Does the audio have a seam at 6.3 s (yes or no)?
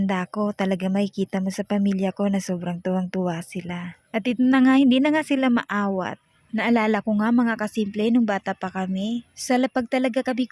no